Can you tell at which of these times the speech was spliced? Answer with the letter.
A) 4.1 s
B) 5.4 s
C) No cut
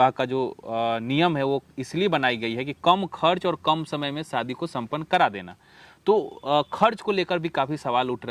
C